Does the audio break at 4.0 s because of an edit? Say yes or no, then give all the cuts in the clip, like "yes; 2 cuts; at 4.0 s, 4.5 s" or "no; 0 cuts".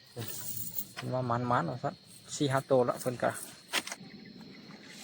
yes; 1 cut; at 4.0 s